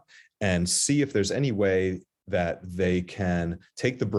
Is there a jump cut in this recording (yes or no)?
no